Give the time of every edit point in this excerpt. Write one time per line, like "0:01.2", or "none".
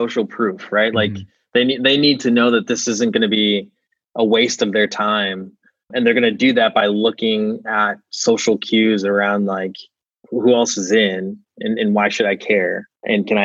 none